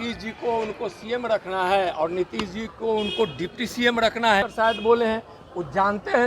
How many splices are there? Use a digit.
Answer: 1